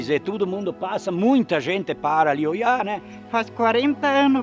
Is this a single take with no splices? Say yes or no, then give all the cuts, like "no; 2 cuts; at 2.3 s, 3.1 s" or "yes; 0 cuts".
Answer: no; 1 cut; at 3.1 s